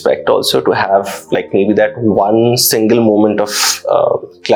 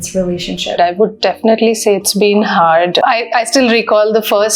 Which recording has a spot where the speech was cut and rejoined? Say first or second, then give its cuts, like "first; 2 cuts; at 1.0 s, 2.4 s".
second; 2 cuts; at 0.7 s, 3.0 s